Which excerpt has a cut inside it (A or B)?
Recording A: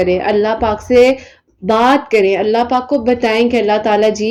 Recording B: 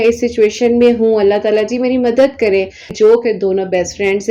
B